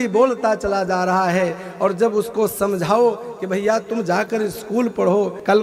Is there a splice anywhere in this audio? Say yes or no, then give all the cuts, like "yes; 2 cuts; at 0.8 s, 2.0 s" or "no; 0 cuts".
no; 0 cuts